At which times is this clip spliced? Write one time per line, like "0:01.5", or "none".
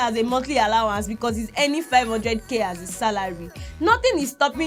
none